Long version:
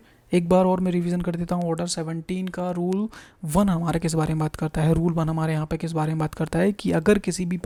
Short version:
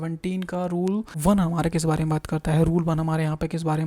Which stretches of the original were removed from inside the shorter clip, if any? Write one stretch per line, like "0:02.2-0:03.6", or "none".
0:03.2-0:03.4